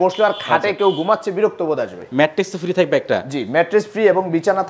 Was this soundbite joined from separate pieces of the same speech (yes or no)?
yes